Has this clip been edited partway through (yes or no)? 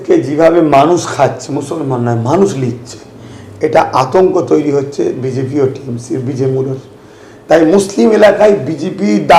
no